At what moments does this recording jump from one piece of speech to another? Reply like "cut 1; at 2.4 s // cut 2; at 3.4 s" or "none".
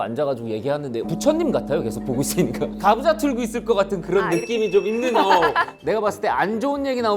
cut 1; at 1.1 s // cut 2; at 2.8 s // cut 3; at 5.7 s